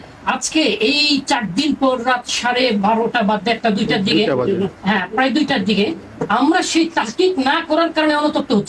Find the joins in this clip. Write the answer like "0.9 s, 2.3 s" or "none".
none

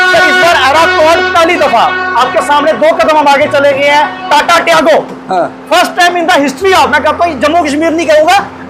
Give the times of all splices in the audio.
none

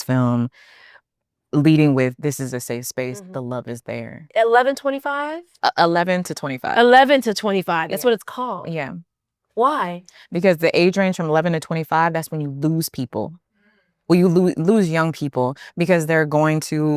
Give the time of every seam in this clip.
none

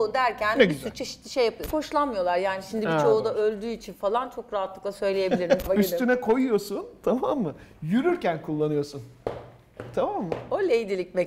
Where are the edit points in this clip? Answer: 1.6 s, 5.6 s

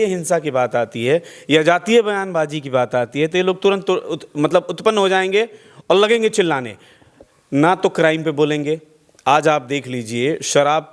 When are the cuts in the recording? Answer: none

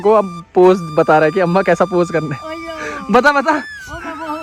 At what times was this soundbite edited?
none

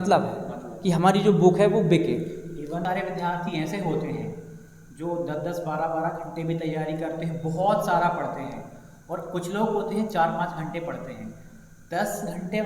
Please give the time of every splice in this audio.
2.8 s

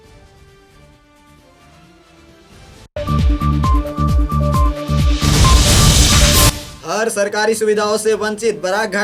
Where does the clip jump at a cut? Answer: none

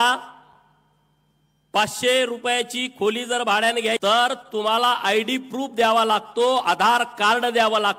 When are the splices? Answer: 4.0 s

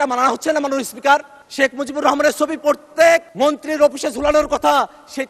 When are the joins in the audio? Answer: 1.4 s, 3.3 s

